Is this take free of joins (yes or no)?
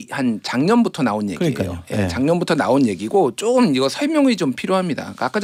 yes